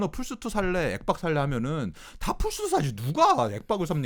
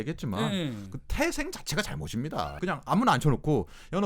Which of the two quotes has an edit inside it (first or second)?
second